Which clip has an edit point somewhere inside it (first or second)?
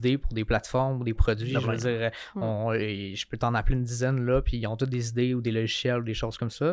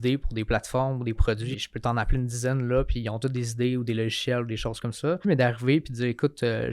second